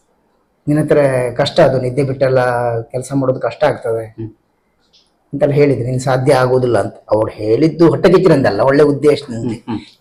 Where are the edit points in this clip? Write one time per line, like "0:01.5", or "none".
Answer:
none